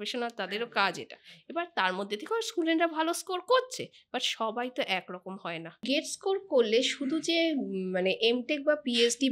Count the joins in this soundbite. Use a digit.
1